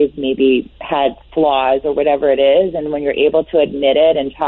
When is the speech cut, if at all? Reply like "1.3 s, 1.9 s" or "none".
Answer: none